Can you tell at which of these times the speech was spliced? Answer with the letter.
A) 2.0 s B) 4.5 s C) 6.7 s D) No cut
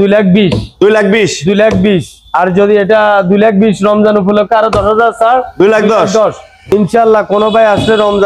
C